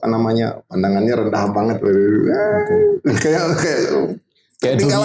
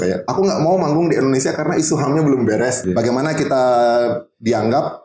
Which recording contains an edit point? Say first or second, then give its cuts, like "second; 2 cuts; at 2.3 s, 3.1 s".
second; 1 cut; at 2.9 s